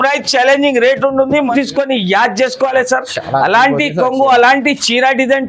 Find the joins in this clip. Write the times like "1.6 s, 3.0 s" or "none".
1.5 s